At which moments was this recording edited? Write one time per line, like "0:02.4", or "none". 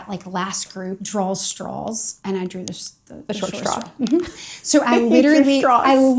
0:01.0
0:02.1